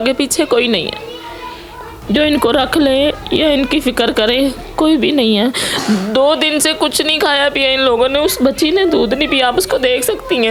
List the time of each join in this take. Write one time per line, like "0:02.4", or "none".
none